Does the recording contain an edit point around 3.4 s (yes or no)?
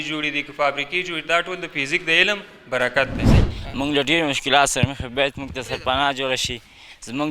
yes